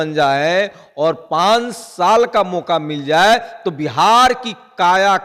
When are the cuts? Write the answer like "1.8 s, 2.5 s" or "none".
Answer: none